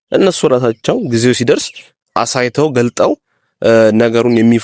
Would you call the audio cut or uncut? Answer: uncut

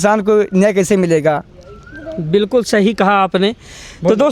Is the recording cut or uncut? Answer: uncut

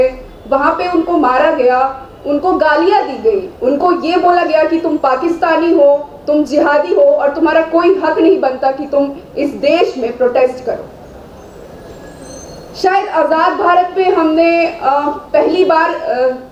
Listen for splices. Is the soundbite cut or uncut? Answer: uncut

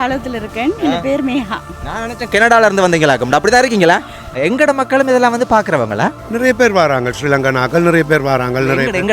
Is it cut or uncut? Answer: cut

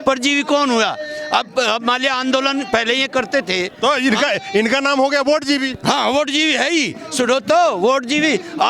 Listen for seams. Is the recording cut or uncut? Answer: uncut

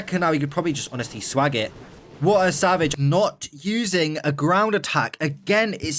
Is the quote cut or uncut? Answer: cut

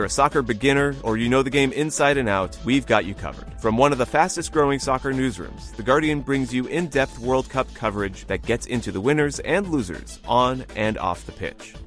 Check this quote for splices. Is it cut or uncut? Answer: uncut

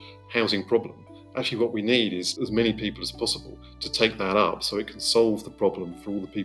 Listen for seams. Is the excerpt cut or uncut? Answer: cut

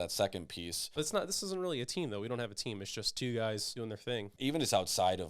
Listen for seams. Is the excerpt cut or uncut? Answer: cut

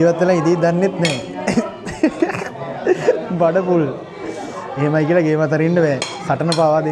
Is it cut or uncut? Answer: uncut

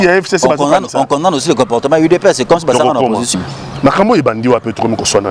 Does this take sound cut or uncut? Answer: cut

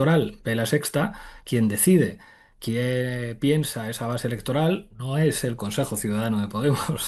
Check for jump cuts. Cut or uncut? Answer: uncut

